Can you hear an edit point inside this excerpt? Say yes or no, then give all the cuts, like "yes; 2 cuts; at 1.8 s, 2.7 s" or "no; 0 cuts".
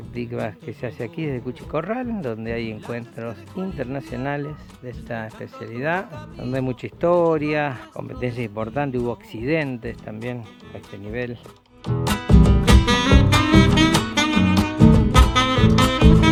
no; 0 cuts